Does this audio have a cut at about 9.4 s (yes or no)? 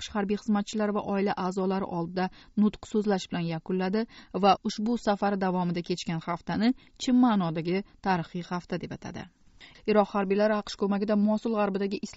yes